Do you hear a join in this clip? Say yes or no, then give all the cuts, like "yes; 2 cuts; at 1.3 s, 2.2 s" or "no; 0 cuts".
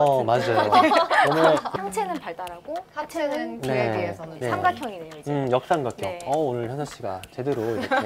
yes; 1 cut; at 1.7 s